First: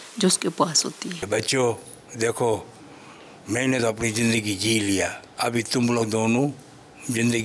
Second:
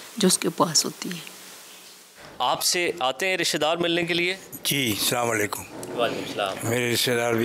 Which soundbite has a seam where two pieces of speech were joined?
first; 1 cut; at 1.3 s

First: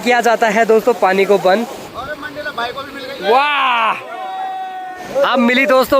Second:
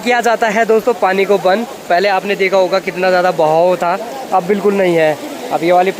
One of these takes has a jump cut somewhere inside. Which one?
first; 2 cuts; at 1.8 s, 5.0 s

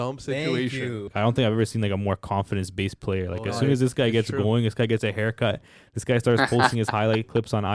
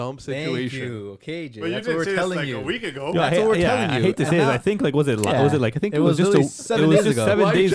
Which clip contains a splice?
first; 1 cut; at 1.1 s

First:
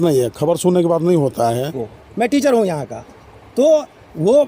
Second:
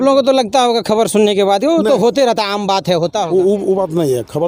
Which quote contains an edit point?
first; 1 cut; at 1.7 s

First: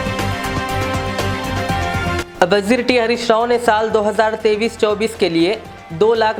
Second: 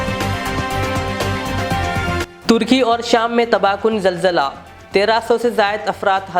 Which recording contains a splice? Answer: second; 1 cut; at 2.2 s

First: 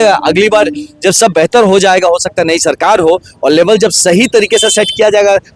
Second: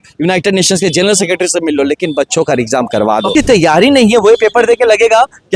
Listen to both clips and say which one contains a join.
second; 1 cut; at 3.3 s

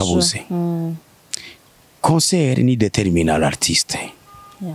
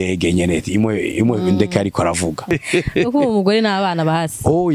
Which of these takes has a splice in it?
second; 1 cut; at 2.5 s

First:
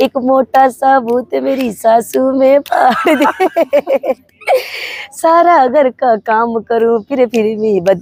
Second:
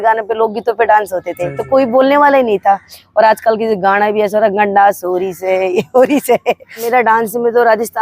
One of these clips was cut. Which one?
second; 1 cut; at 6.8 s

